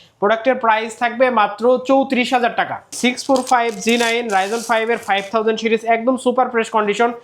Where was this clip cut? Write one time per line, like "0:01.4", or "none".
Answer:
0:02.9